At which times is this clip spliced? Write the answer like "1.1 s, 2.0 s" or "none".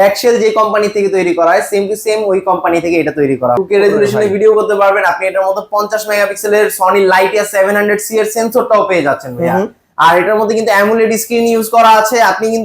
3.6 s